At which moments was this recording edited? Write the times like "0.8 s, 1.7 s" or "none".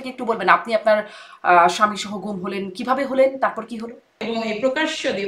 4.2 s